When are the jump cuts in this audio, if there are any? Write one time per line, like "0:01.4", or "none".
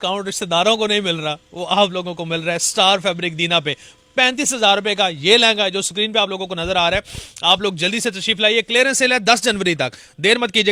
none